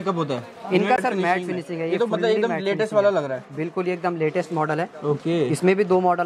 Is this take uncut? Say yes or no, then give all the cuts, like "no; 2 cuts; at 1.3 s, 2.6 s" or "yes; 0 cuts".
no; 1 cut; at 1.0 s